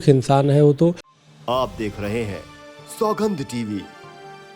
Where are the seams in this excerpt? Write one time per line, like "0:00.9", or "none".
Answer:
0:01.1